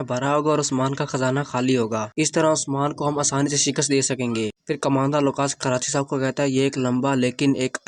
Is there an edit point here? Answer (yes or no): no